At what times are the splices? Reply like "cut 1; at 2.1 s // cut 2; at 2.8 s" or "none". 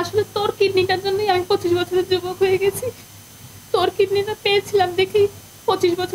none